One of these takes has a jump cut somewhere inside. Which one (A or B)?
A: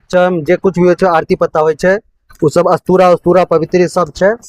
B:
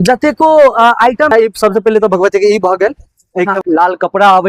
B